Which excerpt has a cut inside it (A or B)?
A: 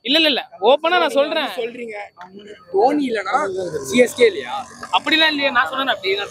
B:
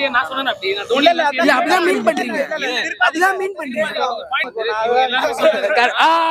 B